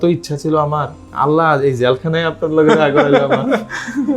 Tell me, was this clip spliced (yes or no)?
yes